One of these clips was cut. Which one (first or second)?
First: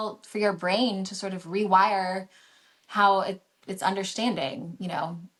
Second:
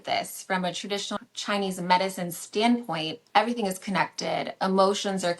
second